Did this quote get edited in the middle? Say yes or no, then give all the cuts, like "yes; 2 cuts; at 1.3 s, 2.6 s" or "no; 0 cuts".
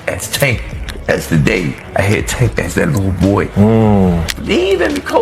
no; 0 cuts